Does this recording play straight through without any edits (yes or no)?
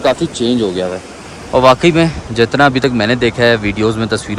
yes